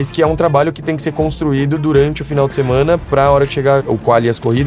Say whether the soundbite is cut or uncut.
uncut